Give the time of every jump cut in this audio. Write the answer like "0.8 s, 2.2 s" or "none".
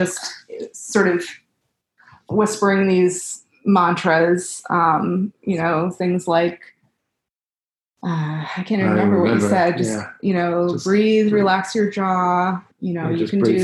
12.7 s